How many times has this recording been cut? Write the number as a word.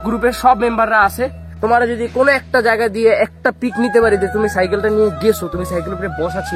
one